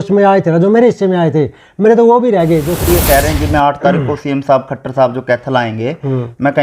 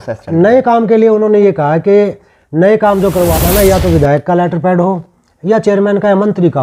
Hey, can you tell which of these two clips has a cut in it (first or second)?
first